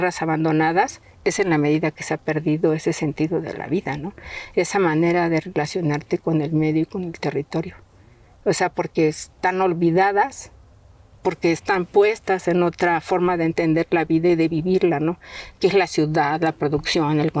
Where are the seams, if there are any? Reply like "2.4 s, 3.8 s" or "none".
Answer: none

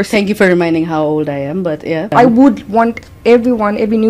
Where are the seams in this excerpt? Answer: 2.1 s

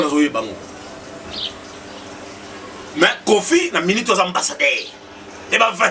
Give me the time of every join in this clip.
1.7 s

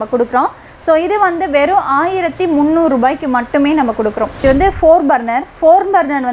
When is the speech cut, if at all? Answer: 4.4 s

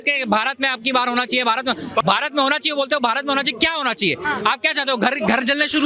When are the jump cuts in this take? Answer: 2.0 s

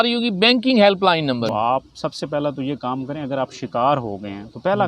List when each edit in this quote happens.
1.5 s

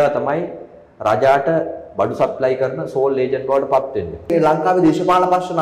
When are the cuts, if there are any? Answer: 4.3 s

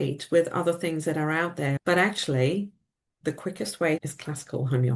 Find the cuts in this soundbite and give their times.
1.8 s, 4.1 s

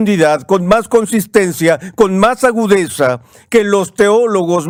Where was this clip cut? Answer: none

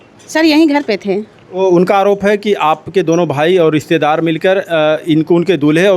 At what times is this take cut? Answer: none

